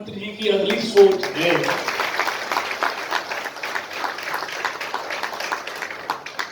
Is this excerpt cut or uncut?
uncut